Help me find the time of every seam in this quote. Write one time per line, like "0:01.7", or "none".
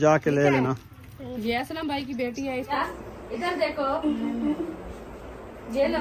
0:02.7